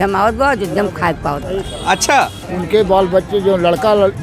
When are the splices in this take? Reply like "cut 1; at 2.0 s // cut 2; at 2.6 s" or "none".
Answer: cut 1; at 2.5 s